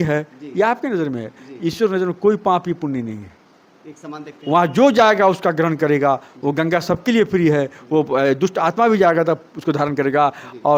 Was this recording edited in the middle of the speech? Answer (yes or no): no